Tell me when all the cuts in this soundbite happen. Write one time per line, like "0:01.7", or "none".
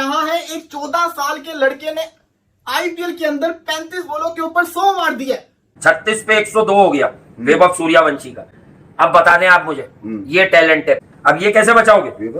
0:05.8
0:11.0